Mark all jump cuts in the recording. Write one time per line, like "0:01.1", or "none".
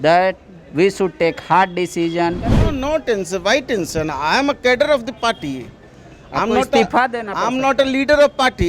0:02.6